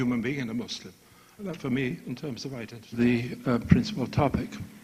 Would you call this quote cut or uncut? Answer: uncut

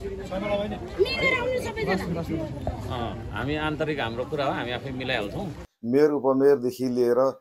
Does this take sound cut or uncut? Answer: cut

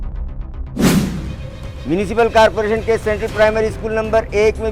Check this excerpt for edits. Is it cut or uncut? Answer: uncut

